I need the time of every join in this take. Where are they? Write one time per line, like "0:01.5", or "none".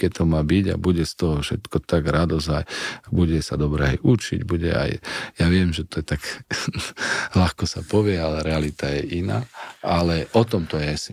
none

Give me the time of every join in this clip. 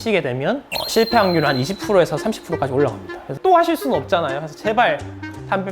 0:03.3

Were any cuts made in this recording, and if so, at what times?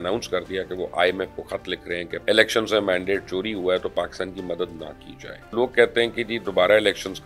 0:02.2
0:05.5

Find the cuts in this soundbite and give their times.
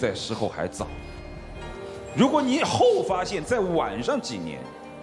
none

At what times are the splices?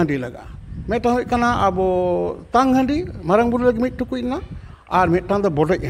none

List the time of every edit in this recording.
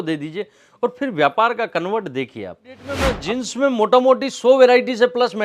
0:02.9

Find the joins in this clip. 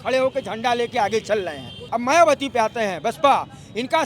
0:01.8

